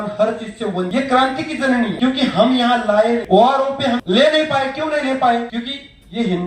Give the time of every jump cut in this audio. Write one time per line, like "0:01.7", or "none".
0:00.9
0:02.0
0:03.2
0:04.0
0:05.5